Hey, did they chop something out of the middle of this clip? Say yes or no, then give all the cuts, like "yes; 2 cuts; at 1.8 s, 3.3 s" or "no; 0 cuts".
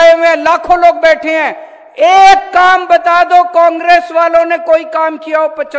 no; 0 cuts